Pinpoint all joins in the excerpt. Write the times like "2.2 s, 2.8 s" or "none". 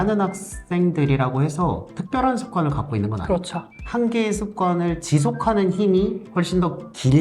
3.6 s